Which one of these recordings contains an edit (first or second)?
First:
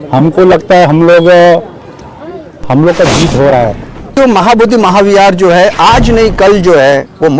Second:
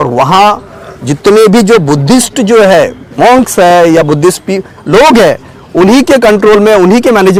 first